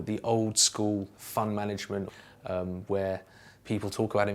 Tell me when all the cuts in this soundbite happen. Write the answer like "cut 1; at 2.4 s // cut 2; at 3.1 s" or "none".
cut 1; at 2.1 s